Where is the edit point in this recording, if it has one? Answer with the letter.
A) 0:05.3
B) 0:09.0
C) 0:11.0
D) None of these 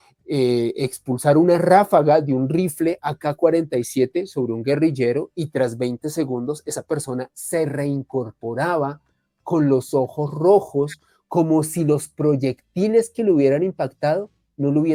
D